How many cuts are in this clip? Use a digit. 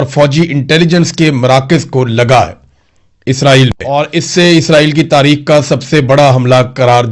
1